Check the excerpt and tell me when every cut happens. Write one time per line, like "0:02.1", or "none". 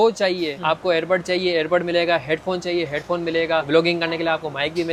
none

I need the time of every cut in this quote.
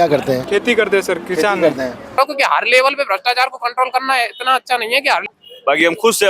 0:02.1
0:05.2

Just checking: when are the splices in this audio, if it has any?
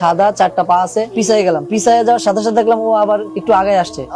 0:01.1

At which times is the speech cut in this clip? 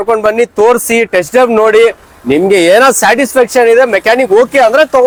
none

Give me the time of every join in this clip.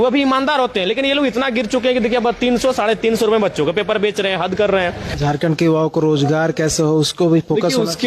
0:05.2

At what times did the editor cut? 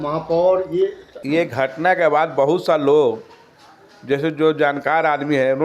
0:01.1

